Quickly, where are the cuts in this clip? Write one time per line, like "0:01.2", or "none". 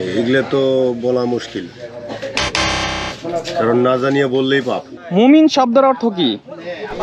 0:04.9

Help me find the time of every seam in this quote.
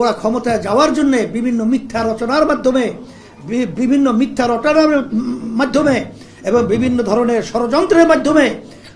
none

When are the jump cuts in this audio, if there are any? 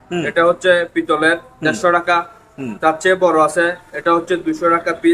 none

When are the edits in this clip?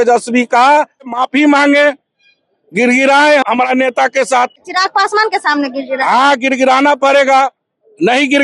0:01.1
0:03.4
0:04.7

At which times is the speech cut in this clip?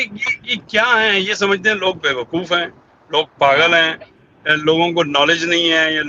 none

